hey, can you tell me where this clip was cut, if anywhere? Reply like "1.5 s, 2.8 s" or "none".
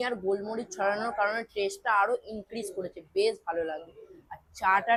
none